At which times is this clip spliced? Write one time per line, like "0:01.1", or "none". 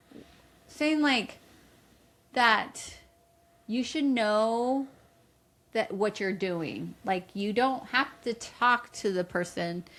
none